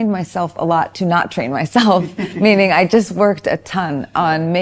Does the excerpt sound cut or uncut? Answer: uncut